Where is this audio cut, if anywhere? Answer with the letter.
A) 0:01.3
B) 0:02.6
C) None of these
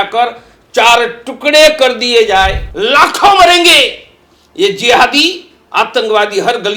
B